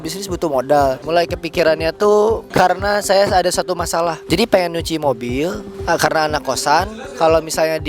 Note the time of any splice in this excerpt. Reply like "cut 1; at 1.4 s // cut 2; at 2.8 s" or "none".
cut 1; at 1.0 s // cut 2; at 2.4 s // cut 3; at 4.2 s // cut 4; at 5.7 s